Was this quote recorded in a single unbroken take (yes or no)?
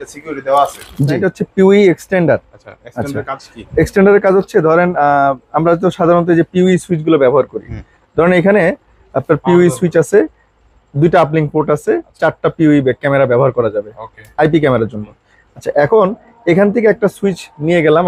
no